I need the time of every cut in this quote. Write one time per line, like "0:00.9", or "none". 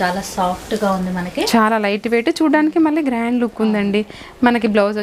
none

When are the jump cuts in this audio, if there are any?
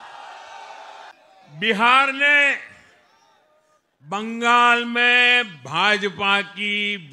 0:01.1

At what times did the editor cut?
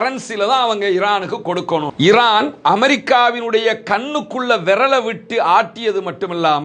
0:01.9

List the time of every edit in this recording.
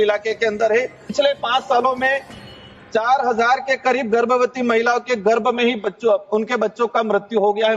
0:01.0

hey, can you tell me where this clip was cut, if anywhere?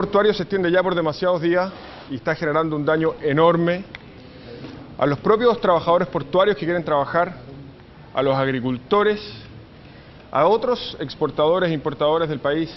0:07.2

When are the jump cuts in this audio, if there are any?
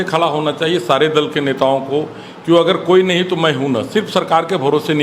none

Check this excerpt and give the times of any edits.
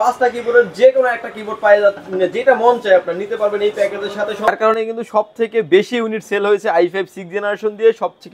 0:04.5

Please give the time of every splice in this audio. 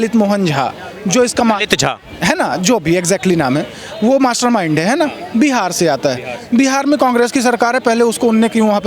none

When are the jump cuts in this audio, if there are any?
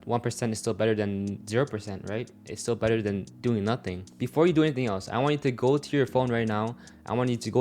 0:04.1

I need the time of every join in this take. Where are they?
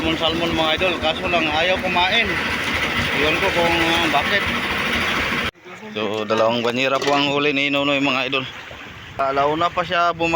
0:05.5
0:09.2

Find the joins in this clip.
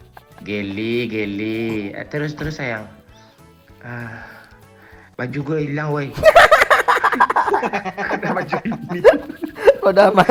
none

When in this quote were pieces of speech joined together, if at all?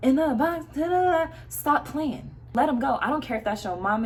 none

